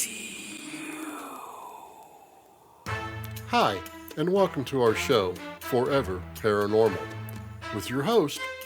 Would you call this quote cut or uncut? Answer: cut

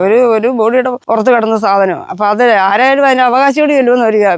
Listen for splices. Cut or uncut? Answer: cut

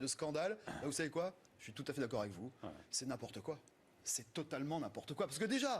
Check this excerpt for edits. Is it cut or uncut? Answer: cut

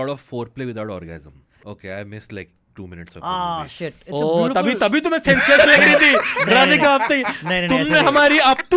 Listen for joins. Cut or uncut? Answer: cut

